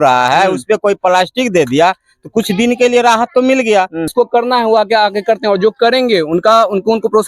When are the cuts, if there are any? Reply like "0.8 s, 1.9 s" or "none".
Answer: 4.1 s